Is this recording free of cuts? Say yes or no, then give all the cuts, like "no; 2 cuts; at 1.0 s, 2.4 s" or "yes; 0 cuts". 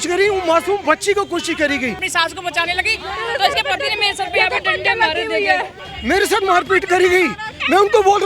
no; 2 cuts; at 2.0 s, 5.8 s